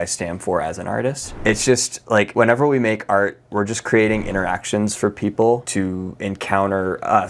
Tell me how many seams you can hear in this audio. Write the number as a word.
three